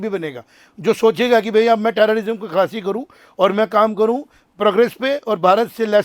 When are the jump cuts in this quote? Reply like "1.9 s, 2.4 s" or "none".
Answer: none

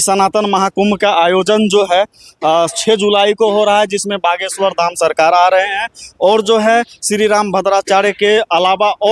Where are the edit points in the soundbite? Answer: none

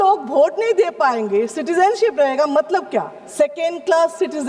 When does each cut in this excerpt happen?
none

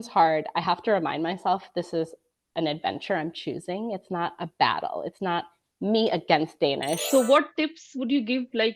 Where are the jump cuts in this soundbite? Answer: 7.0 s

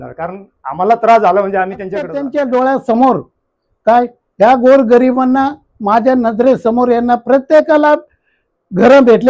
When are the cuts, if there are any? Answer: 2.2 s

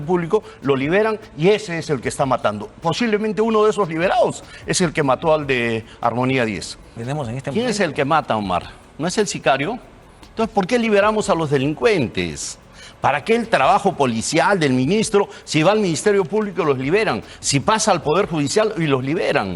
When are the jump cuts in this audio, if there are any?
7.0 s

